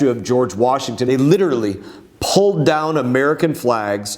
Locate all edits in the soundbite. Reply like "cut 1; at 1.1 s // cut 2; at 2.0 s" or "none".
cut 1; at 1.0 s

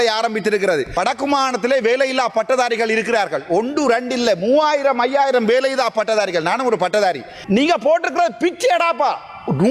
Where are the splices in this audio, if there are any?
cut 1; at 0.9 s // cut 2; at 7.3 s

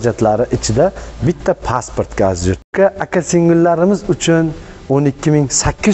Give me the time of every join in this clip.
cut 1; at 2.6 s

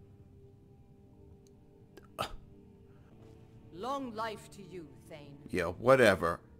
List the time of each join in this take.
cut 1; at 3.1 s

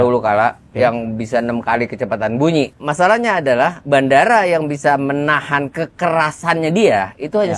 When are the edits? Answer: cut 1; at 2.8 s

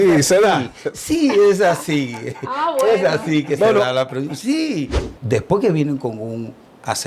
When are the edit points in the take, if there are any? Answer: cut 1; at 5.0 s

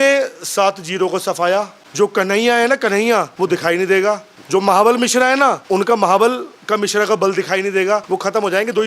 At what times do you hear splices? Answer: cut 1; at 1.8 s // cut 2; at 3.3 s // cut 3; at 4.3 s // cut 4; at 5.6 s // cut 5; at 8.0 s

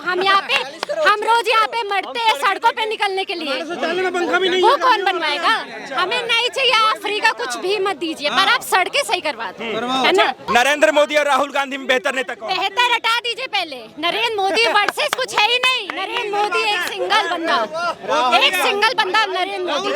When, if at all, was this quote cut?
cut 1; at 10.4 s

